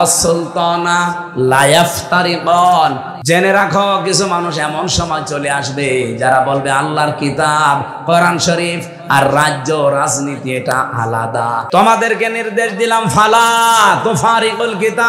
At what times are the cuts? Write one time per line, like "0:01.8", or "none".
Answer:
0:03.1
0:11.7